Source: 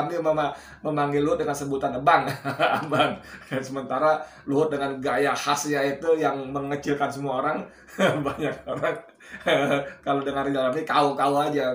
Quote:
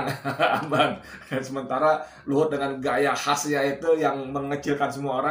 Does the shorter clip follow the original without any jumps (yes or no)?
yes